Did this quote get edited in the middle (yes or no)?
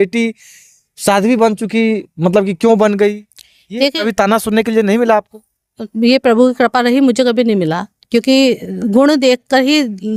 no